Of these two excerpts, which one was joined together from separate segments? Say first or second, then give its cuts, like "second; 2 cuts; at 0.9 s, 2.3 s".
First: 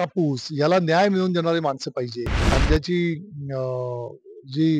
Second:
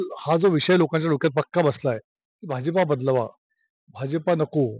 first; 1 cut; at 2.3 s